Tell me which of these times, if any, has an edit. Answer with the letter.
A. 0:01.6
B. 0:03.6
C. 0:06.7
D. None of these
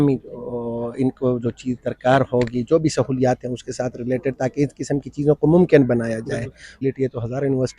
C